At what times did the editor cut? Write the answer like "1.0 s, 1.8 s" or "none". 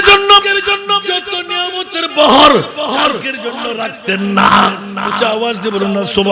none